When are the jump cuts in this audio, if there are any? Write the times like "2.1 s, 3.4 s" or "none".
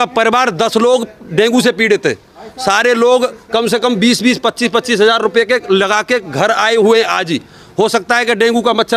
none